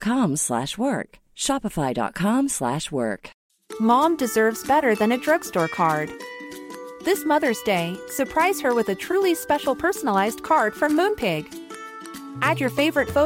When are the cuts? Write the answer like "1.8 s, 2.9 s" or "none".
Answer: 3.3 s